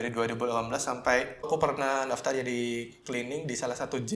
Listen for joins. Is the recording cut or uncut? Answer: cut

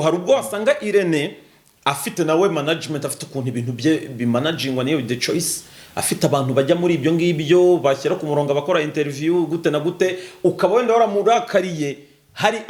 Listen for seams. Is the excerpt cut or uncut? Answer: uncut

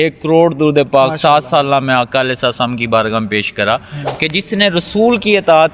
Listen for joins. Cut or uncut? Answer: cut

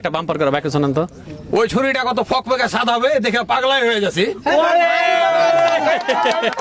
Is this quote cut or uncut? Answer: cut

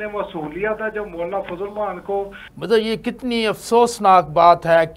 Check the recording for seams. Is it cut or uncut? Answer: cut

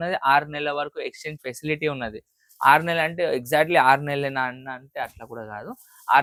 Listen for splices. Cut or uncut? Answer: uncut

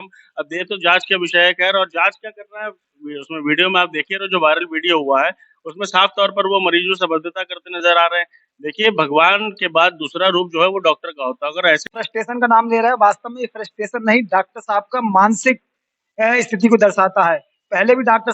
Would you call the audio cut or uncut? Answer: cut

